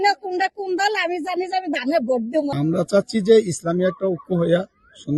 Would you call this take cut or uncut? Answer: cut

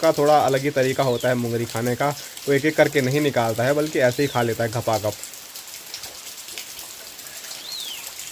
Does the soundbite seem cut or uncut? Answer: uncut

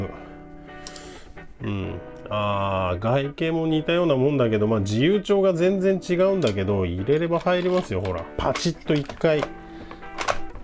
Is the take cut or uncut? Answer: cut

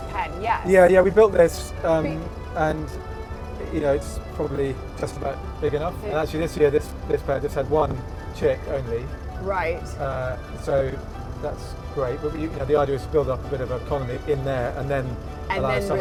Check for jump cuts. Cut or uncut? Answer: uncut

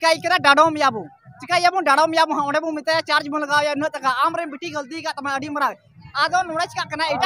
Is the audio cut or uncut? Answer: cut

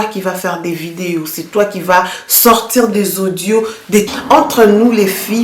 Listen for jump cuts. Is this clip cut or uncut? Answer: cut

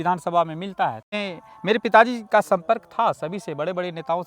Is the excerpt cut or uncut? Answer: cut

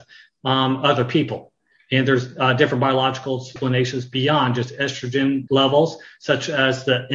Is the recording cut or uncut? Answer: cut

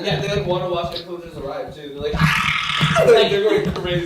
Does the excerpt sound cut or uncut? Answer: cut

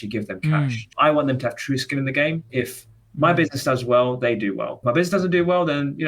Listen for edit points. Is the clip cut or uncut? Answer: cut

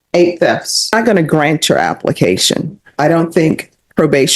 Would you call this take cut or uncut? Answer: cut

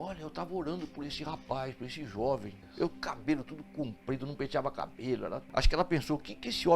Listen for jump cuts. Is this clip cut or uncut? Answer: cut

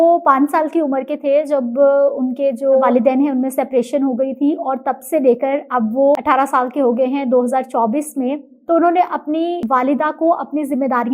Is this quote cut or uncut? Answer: cut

